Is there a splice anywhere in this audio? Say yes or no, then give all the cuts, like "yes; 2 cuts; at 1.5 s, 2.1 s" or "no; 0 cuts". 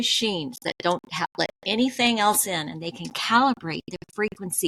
no; 0 cuts